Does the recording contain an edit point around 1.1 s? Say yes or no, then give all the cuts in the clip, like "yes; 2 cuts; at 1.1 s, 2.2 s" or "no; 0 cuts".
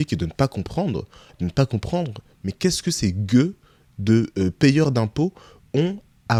no; 0 cuts